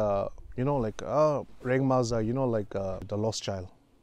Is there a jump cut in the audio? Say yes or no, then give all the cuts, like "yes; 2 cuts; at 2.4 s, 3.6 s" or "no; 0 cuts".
yes; 1 cut; at 3.1 s